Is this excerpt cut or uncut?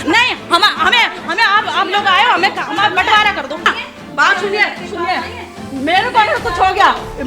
cut